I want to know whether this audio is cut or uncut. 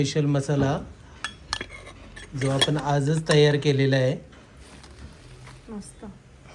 uncut